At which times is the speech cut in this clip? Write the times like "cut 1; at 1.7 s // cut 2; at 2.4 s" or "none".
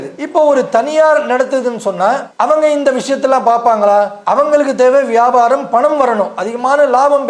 none